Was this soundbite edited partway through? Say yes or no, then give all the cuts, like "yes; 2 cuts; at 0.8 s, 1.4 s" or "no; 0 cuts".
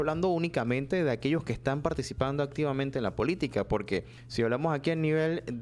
yes; 1 cut; at 4.2 s